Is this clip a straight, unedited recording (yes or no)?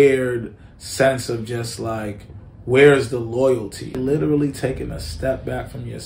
no